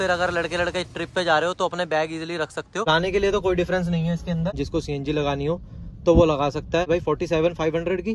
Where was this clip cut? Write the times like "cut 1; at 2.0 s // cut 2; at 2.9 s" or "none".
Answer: cut 1; at 2.9 s // cut 2; at 4.6 s // cut 3; at 6.9 s